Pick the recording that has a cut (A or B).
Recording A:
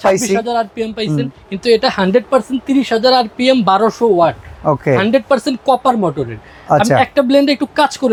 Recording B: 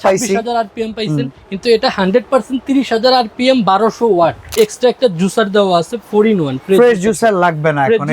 B